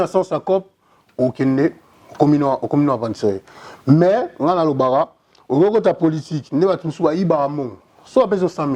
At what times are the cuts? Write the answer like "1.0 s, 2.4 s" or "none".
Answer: none